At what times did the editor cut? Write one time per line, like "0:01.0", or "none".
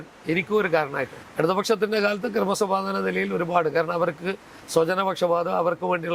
0:01.2